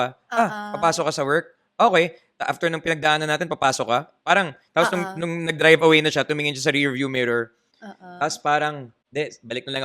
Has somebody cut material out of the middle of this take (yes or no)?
yes